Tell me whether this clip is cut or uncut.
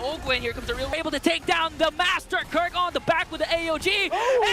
cut